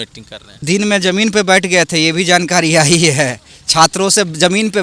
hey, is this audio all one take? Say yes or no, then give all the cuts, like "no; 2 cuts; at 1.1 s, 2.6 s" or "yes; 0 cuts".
yes; 0 cuts